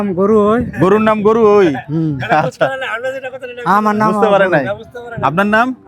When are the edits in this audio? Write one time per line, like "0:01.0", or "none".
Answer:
none